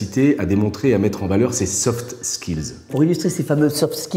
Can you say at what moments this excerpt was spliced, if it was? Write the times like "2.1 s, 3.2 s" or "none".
2.9 s